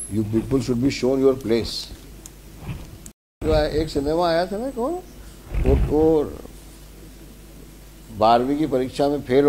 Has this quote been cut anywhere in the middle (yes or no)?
yes